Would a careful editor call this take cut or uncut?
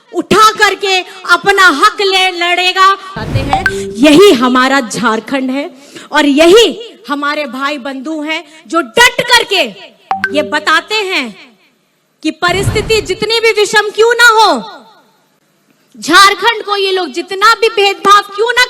cut